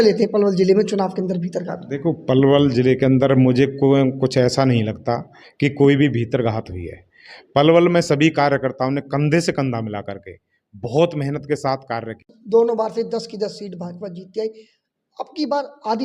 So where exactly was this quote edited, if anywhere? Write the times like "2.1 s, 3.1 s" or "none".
12.3 s